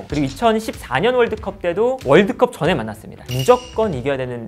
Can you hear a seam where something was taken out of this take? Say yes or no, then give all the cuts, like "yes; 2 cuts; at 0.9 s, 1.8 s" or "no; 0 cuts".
yes; 1 cut; at 3.3 s